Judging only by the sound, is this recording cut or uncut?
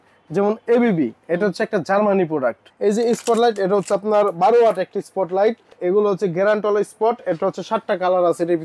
cut